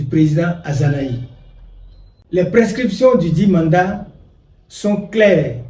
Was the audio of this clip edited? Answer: no; 0 cuts

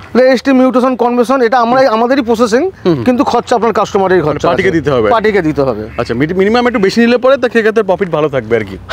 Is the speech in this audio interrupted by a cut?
no; 0 cuts

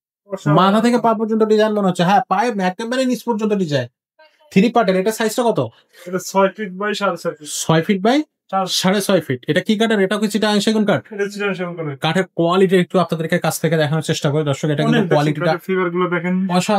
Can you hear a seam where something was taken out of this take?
no; 0 cuts

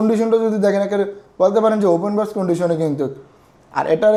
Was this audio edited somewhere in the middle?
no; 0 cuts

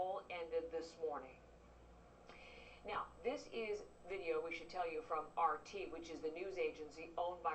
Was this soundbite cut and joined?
yes; 1 cut; at 3.5 s

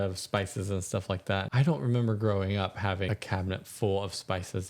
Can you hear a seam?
yes; 2 cuts; at 1.5 s, 3.1 s

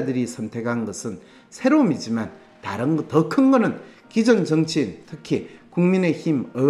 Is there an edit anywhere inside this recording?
no; 0 cuts

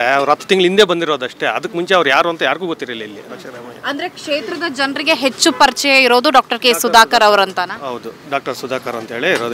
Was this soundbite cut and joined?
no; 0 cuts

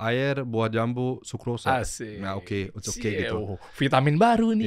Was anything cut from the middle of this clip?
no; 0 cuts

